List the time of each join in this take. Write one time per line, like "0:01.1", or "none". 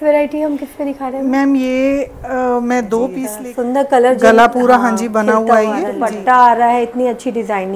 0:03.3
0:06.1